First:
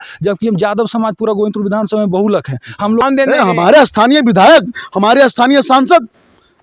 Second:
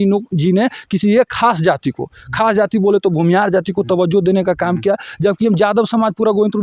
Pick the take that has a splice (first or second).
first